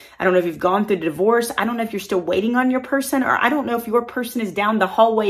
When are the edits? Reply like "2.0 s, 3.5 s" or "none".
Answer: none